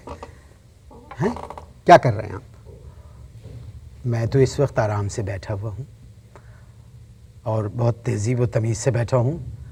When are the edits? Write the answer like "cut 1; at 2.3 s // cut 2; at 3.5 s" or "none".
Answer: none